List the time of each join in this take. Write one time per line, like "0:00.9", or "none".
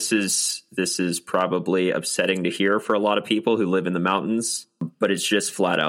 0:04.9